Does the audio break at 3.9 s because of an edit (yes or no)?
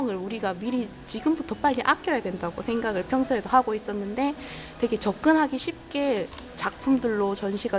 no